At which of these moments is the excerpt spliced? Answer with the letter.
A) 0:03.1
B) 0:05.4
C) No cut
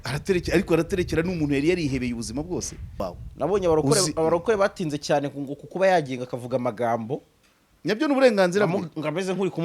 A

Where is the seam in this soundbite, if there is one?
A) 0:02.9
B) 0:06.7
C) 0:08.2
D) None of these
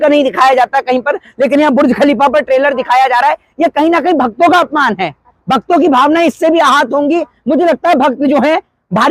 D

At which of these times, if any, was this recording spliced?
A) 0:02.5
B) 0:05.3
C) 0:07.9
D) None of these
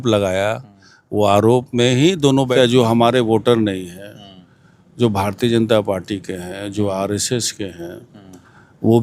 A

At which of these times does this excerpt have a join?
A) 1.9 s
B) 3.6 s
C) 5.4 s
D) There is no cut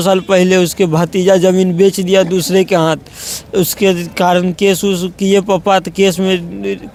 D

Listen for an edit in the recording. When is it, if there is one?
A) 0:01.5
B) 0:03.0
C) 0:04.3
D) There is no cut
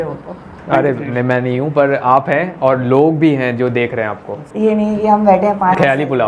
C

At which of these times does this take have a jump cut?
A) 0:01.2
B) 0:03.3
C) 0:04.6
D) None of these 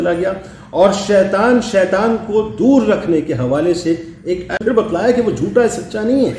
C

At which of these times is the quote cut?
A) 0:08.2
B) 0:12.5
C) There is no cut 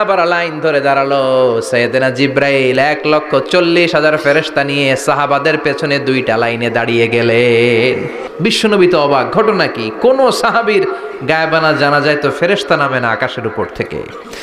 A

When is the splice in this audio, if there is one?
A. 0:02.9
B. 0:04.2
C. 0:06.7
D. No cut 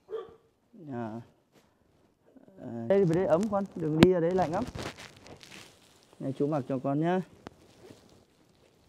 A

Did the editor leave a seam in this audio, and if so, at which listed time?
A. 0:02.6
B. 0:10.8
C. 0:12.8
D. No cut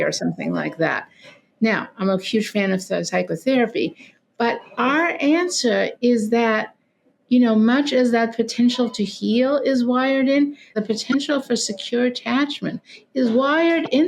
B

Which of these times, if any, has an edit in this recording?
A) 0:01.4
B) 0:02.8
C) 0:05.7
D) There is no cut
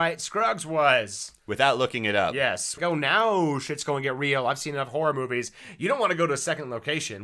B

